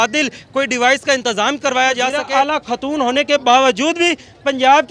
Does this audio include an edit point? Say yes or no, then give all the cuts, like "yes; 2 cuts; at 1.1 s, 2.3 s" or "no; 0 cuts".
yes; 1 cut; at 2.2 s